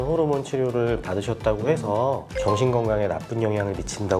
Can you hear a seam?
no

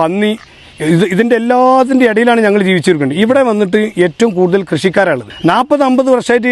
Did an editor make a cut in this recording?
yes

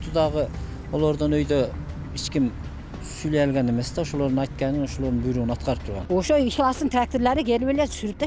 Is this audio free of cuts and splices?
no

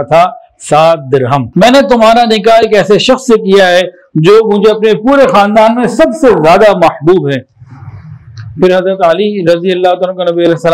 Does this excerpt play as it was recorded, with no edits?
no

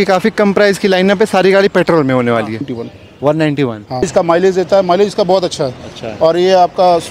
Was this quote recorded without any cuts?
no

